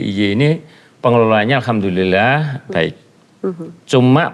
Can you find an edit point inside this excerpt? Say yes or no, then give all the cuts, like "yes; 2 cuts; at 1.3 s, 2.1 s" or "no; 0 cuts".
no; 0 cuts